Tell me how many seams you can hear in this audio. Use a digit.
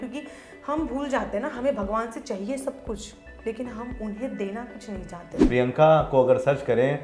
1